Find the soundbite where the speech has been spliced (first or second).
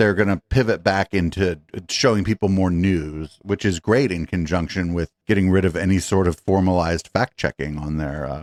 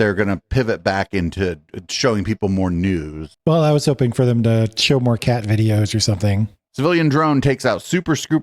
second